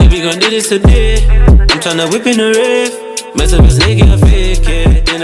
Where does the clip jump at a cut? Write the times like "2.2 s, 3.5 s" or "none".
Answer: none